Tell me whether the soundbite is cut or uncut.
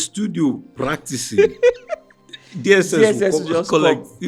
uncut